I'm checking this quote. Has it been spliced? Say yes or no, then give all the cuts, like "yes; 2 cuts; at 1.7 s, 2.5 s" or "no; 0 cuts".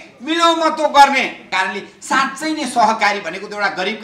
yes; 1 cut; at 1.5 s